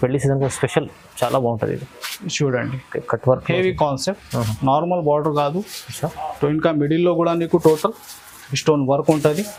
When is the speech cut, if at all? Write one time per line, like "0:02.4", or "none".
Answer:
none